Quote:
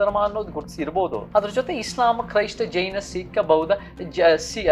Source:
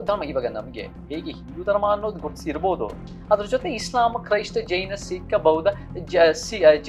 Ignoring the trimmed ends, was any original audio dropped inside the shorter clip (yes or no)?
yes